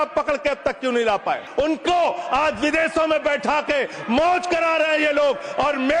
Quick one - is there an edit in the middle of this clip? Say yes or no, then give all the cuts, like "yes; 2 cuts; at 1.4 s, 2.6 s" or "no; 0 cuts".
yes; 1 cut; at 1.5 s